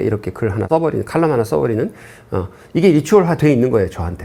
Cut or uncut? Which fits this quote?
uncut